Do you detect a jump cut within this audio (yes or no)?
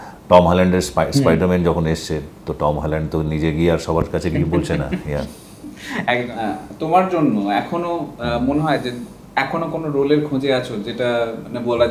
no